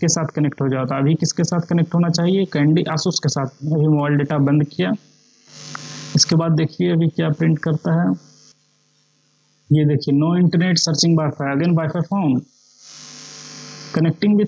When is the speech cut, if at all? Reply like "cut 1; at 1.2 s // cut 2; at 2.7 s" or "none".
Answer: none